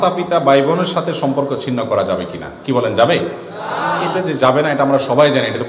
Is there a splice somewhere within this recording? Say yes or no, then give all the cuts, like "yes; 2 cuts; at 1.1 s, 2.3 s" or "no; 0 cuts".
no; 0 cuts